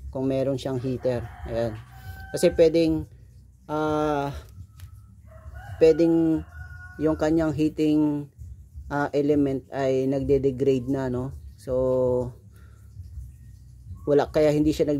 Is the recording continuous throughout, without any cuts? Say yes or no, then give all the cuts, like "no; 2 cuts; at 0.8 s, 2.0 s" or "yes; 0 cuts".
yes; 0 cuts